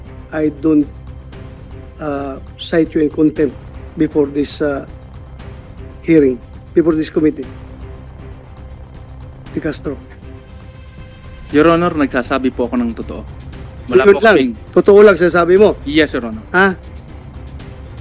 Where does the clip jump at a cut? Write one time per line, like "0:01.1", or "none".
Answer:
none